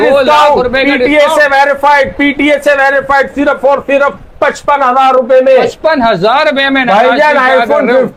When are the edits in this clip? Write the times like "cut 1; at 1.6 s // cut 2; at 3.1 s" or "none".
none